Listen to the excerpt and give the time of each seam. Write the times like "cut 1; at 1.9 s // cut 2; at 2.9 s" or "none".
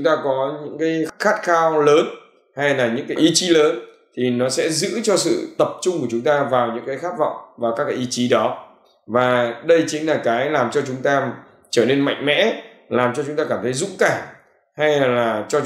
cut 1; at 1.1 s // cut 2; at 3.2 s

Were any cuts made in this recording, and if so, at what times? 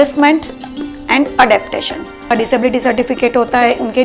cut 1; at 2.3 s

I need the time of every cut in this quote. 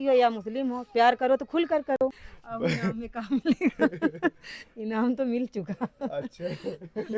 cut 1; at 2.2 s

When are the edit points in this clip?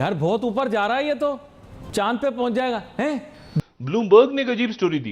cut 1; at 3.6 s

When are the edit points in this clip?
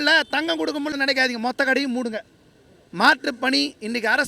cut 1; at 0.9 s

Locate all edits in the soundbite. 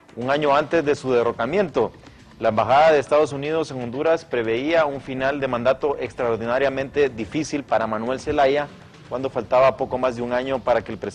cut 1; at 9.1 s

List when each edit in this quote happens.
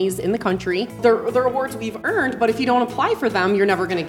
cut 1; at 1.0 s

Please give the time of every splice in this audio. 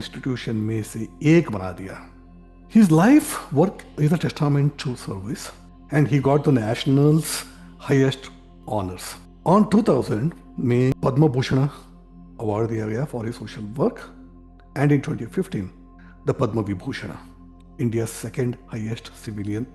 none

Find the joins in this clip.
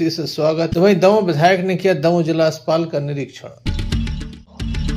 cut 1; at 3.6 s

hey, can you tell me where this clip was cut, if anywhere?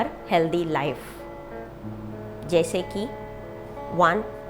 none

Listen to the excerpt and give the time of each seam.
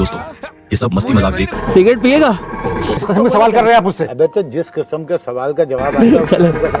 cut 1; at 1.5 s // cut 2; at 2.9 s

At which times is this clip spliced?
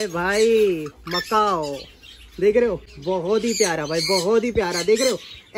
none

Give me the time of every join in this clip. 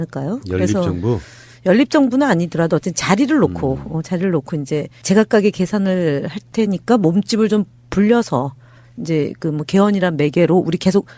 cut 1; at 8.6 s

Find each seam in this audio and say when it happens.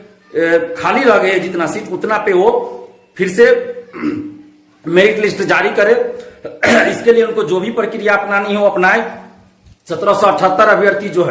none

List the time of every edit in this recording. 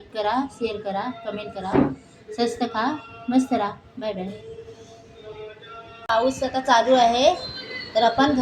cut 1; at 6.0 s

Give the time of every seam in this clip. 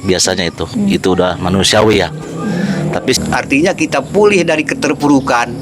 cut 1; at 3.2 s

